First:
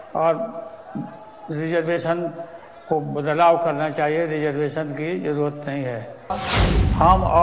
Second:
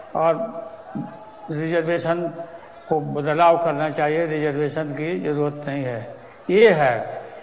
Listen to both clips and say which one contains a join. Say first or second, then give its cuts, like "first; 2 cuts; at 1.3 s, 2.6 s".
first; 1 cut; at 6.4 s